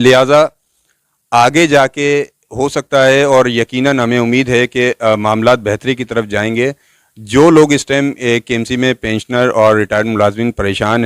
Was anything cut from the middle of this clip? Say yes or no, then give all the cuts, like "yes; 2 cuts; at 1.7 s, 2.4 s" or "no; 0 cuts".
no; 0 cuts